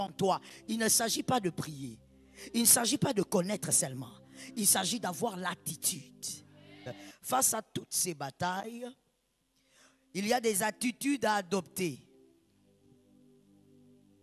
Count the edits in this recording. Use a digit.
2